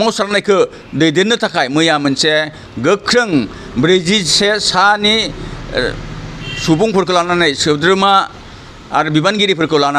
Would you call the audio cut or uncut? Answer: uncut